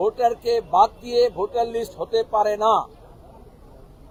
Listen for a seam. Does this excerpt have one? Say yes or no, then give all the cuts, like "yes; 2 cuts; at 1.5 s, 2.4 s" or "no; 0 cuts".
no; 0 cuts